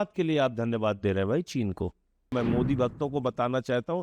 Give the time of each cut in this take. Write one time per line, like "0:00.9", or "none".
0:02.3